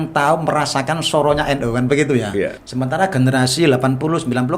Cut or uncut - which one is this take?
cut